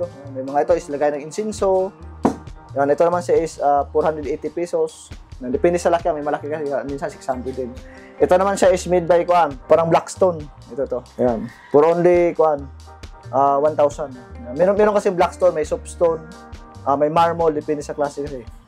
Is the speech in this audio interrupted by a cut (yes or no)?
no